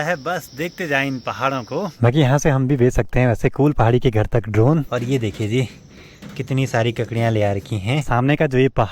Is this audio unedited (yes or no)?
no